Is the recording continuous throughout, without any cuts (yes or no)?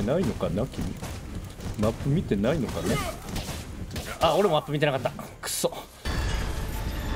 yes